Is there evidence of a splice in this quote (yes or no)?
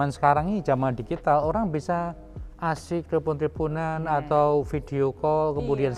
no